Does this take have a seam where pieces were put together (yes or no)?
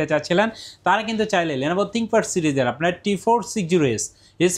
no